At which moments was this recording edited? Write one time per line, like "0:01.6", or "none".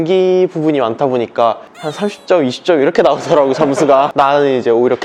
none